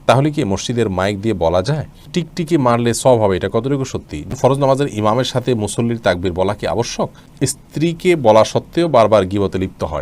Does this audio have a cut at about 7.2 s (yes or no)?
yes